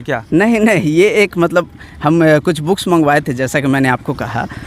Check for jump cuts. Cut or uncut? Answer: uncut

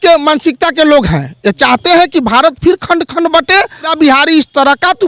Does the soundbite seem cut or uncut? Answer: cut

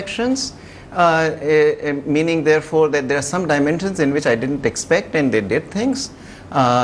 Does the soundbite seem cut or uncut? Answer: cut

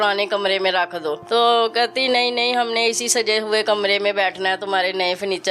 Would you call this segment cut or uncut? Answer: cut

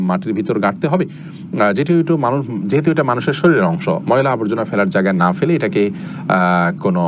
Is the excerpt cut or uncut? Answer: uncut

